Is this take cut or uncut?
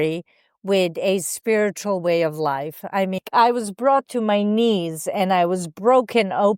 cut